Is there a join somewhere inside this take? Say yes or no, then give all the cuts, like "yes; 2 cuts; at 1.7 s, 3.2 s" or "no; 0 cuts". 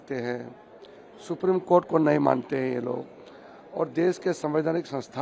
no; 0 cuts